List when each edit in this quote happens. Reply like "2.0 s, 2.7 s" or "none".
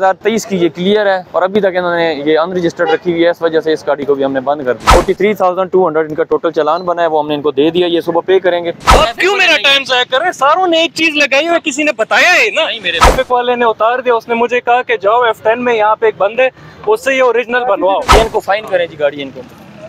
4.8 s, 8.8 s, 13.1 s, 18.1 s